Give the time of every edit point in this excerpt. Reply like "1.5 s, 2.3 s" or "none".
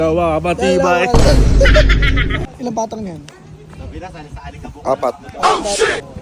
2.5 s